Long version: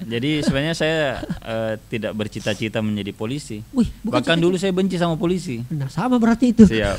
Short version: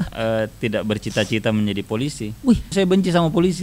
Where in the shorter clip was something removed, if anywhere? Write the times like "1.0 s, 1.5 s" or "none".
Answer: 2.7 s